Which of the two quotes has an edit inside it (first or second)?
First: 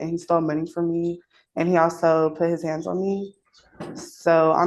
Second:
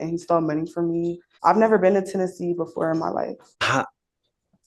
second